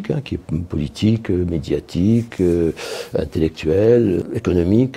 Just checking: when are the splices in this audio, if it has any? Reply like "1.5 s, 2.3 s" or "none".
none